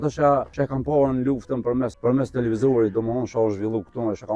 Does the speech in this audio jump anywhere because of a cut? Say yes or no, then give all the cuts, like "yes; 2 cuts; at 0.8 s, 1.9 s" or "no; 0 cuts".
no; 0 cuts